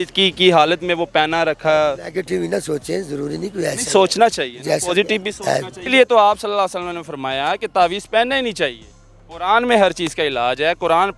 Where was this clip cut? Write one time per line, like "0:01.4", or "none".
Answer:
0:05.8

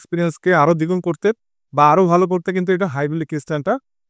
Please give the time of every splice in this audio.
none

